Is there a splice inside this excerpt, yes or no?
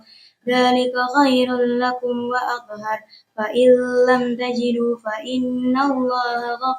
no